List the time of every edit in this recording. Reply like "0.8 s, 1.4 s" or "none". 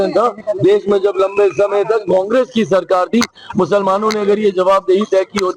none